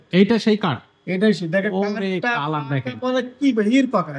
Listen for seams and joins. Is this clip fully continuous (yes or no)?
yes